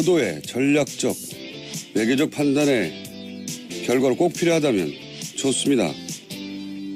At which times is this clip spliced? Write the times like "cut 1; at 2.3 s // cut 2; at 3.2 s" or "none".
cut 1; at 5.1 s